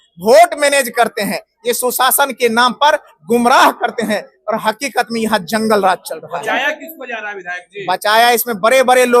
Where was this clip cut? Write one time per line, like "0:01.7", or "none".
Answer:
none